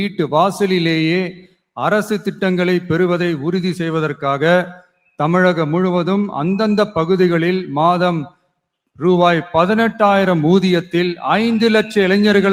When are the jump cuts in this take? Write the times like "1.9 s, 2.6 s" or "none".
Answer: none